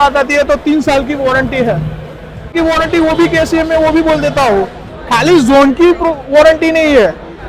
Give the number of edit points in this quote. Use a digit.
1